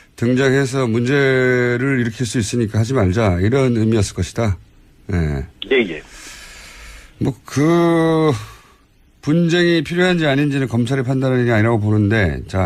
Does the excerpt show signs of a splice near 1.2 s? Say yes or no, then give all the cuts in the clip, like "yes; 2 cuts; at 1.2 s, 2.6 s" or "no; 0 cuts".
yes; 1 cut; at 1.2 s